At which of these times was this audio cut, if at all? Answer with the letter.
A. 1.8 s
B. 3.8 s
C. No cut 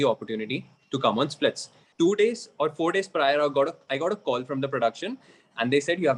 A